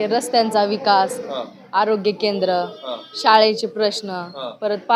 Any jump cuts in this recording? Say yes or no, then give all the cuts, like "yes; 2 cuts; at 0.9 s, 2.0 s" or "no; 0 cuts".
no; 0 cuts